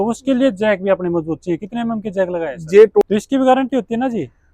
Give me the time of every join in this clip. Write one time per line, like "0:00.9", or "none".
0:03.0